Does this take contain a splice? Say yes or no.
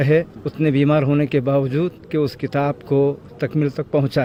no